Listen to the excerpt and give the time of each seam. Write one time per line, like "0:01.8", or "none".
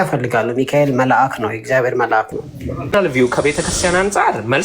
0:02.9